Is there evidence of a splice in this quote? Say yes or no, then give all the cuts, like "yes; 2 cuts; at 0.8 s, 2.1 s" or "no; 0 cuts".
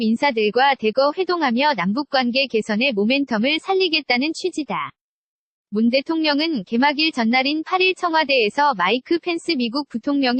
no; 0 cuts